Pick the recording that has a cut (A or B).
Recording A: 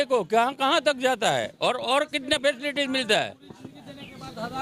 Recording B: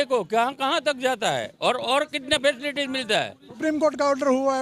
B